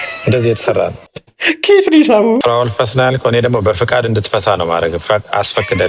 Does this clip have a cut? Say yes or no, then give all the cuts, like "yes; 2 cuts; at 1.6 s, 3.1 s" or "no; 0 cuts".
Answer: yes; 1 cut; at 2.4 s